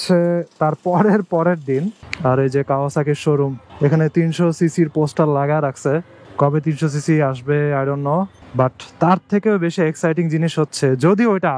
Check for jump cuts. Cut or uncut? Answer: cut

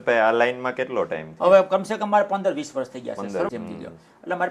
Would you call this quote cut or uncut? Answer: cut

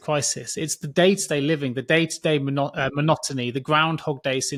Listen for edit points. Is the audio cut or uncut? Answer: uncut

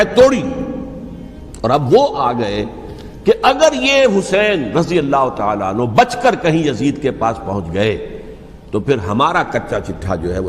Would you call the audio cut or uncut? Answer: uncut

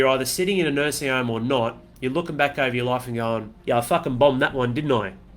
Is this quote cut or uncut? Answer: cut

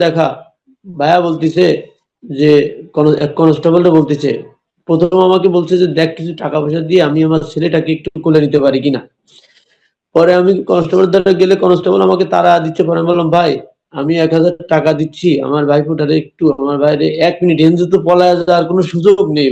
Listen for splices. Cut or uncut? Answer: uncut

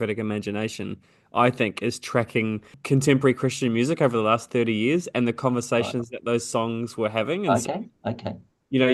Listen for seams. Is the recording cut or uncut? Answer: cut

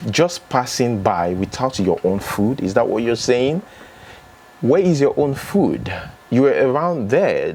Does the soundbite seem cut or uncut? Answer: uncut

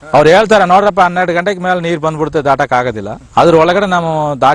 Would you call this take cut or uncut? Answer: uncut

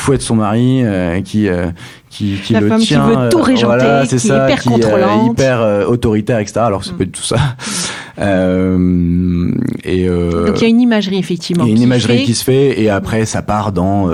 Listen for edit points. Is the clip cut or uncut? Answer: uncut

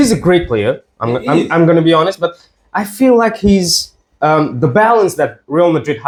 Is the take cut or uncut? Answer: uncut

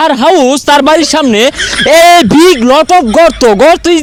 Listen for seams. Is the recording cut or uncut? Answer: uncut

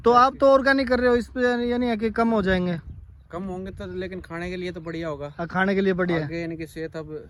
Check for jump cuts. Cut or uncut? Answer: uncut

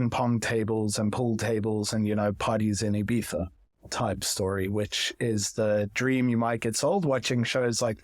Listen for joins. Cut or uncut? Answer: uncut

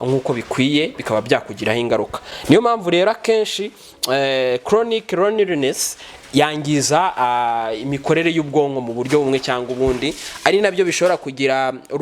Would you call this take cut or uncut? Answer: uncut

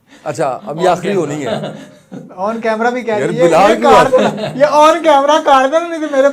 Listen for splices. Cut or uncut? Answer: uncut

